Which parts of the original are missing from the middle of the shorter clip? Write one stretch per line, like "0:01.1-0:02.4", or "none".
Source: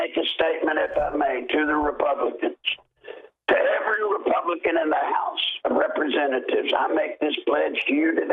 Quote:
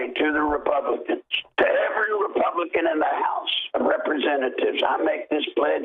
0:02.7-0:03.3